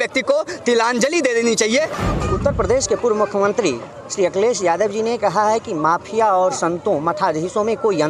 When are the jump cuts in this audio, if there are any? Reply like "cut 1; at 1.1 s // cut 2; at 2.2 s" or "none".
cut 1; at 2.0 s

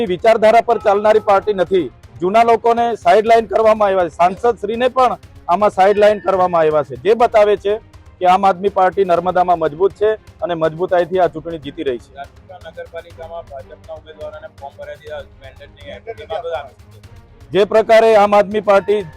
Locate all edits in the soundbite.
none

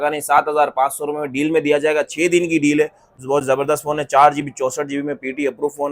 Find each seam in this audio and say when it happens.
cut 1; at 3.1 s

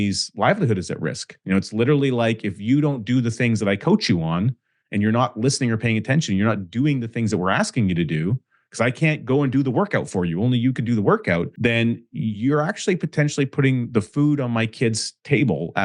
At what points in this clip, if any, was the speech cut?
cut 1; at 1.4 s // cut 2; at 11.5 s

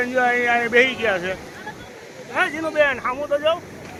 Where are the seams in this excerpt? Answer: none

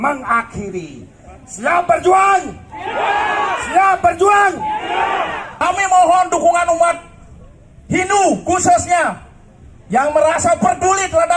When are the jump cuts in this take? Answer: cut 1; at 5.6 s

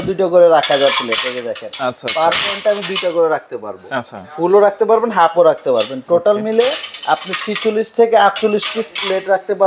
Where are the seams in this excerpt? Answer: none

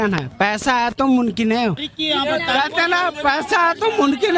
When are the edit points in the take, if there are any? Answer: cut 1; at 1.9 s

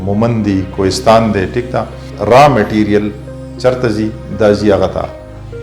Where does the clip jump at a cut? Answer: cut 1; at 2.1 s

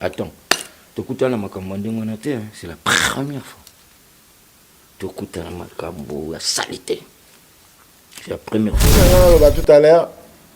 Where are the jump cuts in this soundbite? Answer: cut 1; at 9.0 s

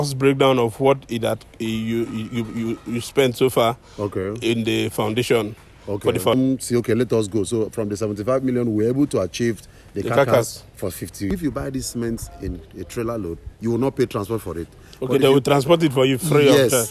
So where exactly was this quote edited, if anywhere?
cut 1; at 6.3 s // cut 2; at 11.3 s

